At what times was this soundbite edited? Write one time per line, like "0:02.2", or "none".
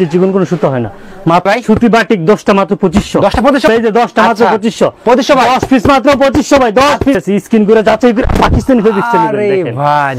0:01.5
0:03.7
0:07.2